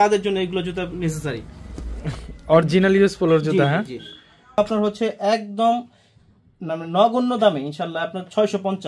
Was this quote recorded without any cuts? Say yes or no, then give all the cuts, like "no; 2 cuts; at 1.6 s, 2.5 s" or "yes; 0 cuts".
no; 1 cut; at 4.6 s